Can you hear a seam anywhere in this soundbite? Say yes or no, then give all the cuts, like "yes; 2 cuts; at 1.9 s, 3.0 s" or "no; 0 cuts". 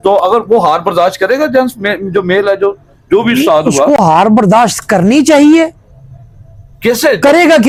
no; 0 cuts